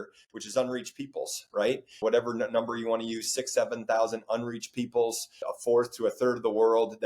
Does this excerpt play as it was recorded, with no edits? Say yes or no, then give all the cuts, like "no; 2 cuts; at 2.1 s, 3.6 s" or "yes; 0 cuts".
no; 2 cuts; at 2.0 s, 5.4 s